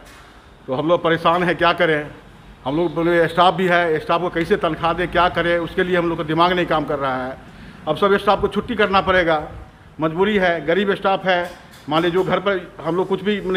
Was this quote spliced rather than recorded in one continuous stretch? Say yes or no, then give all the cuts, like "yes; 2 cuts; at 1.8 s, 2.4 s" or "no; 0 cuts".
no; 0 cuts